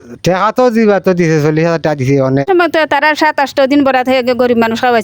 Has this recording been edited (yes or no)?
yes